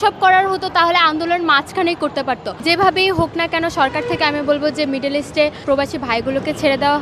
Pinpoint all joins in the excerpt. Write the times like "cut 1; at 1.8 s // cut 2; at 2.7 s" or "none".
cut 1; at 2.6 s // cut 2; at 5.6 s